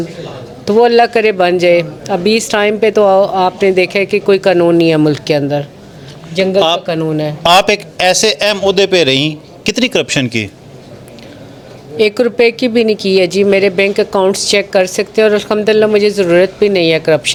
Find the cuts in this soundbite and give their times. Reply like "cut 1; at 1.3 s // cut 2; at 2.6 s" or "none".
none